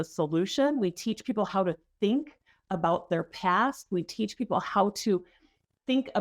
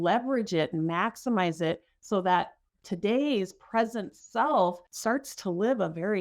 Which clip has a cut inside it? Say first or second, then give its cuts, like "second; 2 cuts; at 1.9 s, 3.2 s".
second; 1 cut; at 4.9 s